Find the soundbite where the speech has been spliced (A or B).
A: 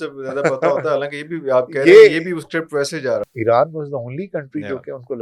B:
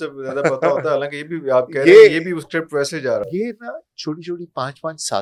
A